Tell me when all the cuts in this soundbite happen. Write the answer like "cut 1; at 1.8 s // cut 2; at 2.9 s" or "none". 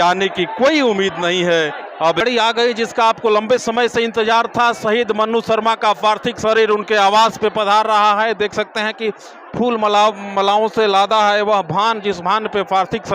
cut 1; at 2.2 s

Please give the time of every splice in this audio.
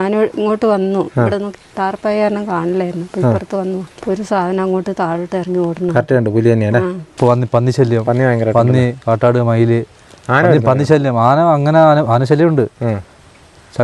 cut 1; at 3.9 s // cut 2; at 7.1 s

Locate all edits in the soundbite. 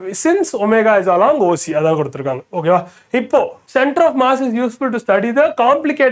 cut 1; at 3.6 s

